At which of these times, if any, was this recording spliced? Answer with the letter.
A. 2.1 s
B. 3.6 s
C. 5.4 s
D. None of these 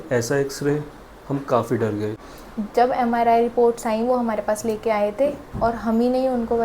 A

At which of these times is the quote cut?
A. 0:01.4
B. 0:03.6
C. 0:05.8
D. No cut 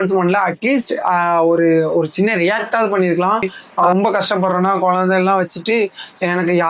B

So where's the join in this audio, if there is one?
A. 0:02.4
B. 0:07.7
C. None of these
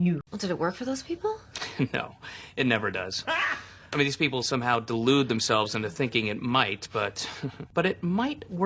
C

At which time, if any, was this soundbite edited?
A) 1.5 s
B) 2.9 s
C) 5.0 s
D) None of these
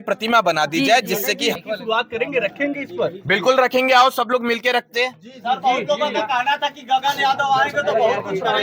A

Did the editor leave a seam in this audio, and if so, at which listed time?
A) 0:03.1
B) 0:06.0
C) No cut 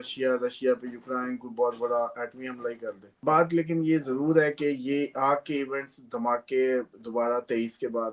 A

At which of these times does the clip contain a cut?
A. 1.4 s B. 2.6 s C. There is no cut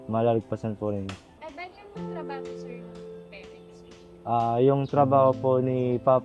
C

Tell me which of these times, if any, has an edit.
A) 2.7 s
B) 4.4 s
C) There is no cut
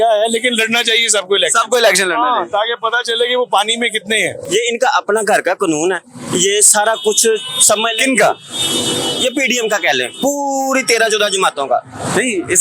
B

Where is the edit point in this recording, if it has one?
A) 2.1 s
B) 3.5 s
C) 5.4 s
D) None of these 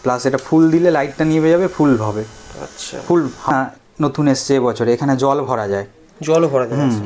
B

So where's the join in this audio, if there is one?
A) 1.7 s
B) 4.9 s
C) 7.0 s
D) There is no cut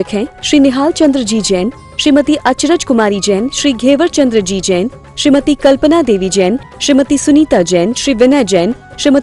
D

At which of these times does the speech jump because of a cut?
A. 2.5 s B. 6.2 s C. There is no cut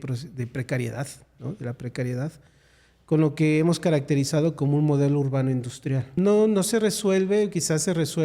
B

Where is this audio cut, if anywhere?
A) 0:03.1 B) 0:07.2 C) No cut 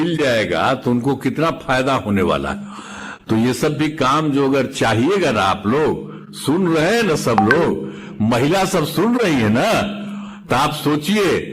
C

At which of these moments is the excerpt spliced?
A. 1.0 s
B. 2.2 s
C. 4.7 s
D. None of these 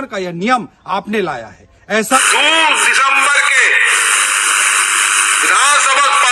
B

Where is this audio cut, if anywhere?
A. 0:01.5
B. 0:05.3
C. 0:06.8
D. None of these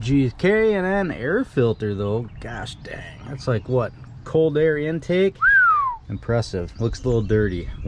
D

